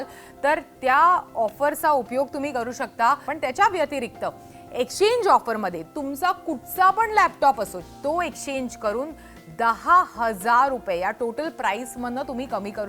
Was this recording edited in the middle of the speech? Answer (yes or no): yes